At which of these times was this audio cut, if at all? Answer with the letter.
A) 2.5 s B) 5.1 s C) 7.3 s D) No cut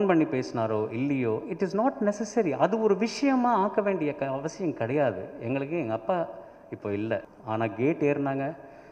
C